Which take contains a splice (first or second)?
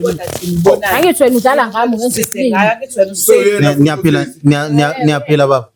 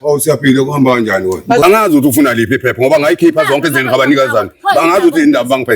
second